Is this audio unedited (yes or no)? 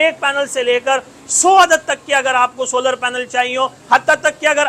yes